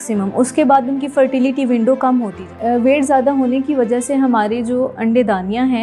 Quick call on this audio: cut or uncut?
cut